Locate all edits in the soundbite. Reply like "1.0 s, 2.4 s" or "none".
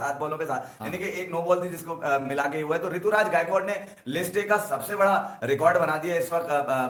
none